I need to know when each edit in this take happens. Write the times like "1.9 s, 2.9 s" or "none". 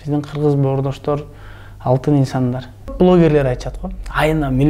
2.9 s